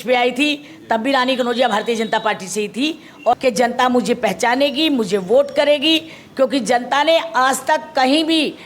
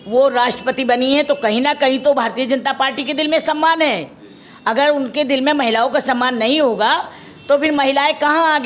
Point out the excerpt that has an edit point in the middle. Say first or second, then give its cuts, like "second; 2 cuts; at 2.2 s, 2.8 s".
first; 1 cut; at 3.3 s